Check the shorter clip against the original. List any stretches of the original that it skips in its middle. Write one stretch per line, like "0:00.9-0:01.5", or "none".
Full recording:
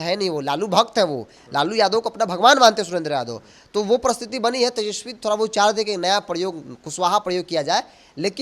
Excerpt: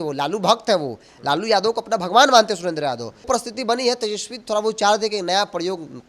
0:03.5-0:04.0